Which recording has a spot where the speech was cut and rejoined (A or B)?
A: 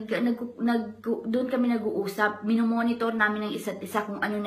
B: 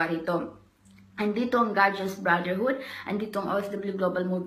A